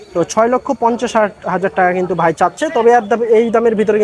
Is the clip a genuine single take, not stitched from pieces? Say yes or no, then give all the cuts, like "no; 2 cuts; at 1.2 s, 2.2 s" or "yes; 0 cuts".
yes; 0 cuts